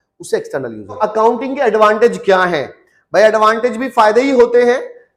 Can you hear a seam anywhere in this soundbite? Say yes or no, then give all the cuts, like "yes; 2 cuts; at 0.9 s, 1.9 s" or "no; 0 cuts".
yes; 1 cut; at 1.0 s